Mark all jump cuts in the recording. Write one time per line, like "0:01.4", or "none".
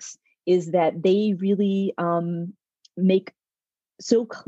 none

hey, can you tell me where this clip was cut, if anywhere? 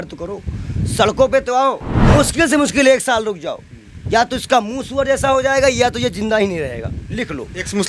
0:01.9

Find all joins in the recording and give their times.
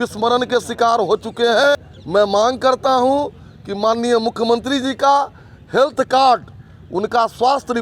0:01.9

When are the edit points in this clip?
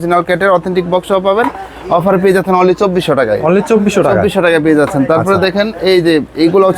none

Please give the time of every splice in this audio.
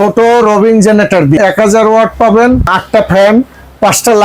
0:01.4

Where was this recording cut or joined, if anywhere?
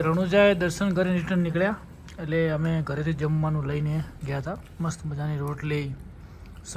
none

